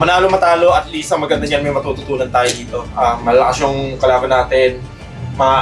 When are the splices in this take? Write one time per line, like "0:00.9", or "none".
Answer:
none

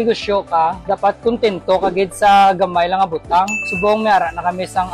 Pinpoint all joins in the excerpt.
0:03.6

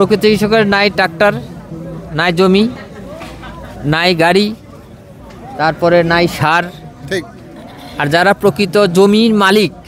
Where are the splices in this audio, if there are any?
none

